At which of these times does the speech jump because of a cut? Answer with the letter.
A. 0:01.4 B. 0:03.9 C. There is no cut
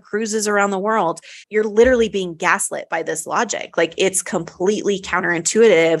A